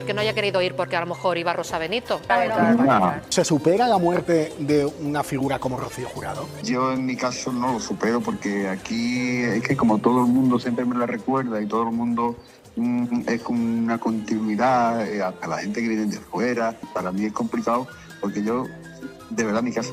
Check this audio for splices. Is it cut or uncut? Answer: uncut